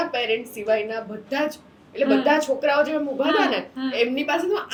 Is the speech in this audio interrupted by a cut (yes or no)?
no